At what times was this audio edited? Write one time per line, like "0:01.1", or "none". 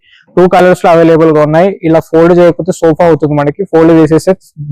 none